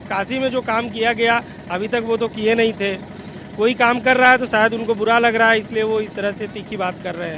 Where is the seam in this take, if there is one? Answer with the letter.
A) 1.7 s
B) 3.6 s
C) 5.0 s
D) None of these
D